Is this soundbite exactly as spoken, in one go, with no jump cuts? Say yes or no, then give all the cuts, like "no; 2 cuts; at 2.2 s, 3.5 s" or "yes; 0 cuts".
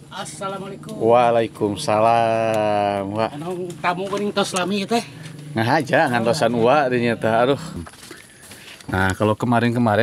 no; 1 cut; at 7.7 s